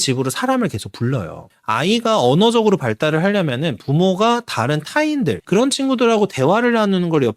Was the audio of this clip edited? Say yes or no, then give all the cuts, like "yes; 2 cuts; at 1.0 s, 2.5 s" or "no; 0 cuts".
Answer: yes; 2 cuts; at 1.4 s, 5.4 s